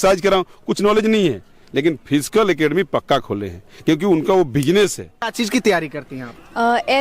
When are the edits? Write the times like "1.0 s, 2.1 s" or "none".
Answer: 5.3 s